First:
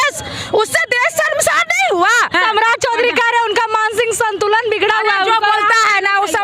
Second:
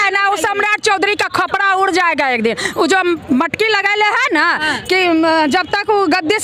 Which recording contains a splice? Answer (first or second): first